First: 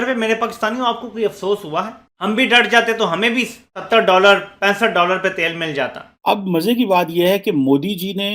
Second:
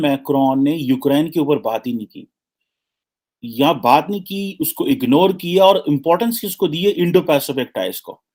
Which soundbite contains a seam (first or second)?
first